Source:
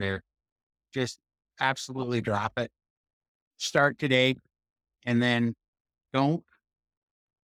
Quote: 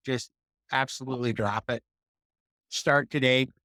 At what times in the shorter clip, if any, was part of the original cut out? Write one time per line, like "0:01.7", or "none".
none